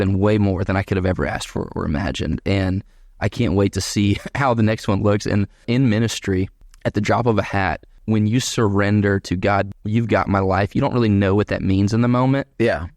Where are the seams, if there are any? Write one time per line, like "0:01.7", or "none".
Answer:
0:05.6
0:06.6
0:08.0
0:09.7